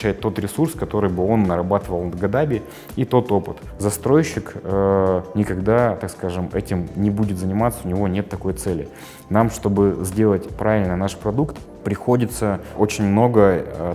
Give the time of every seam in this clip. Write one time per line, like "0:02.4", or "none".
none